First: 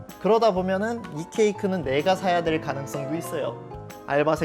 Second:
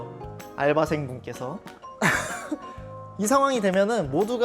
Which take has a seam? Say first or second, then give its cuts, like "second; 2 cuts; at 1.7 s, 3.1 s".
second; 1 cut; at 1.9 s